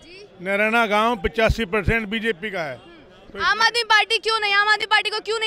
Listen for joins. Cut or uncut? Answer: uncut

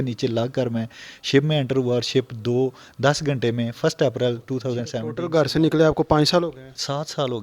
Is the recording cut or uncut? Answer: cut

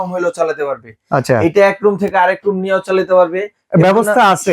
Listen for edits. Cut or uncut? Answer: uncut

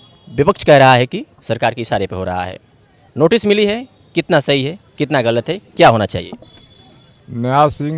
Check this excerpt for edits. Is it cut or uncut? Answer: uncut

